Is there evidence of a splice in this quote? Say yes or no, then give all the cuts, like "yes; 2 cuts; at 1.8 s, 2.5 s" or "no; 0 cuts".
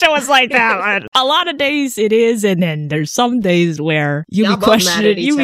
yes; 2 cuts; at 1.1 s, 4.2 s